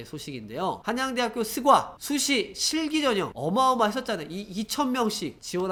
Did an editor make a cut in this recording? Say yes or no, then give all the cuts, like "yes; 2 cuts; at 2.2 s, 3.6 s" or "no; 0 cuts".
no; 0 cuts